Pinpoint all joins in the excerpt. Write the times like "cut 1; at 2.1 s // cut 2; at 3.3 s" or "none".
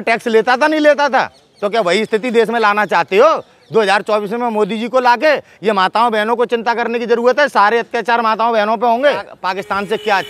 cut 1; at 9.4 s